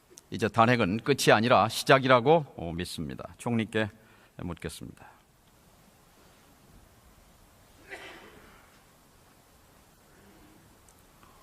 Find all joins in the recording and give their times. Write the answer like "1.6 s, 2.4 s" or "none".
3.3 s